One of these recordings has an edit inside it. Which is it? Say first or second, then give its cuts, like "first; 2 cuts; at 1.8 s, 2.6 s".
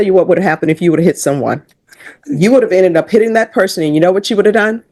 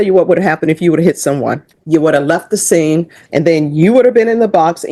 second; 2 cuts; at 1.7 s, 3.2 s